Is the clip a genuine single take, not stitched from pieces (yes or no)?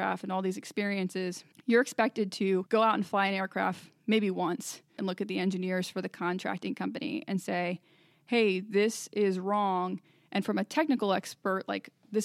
no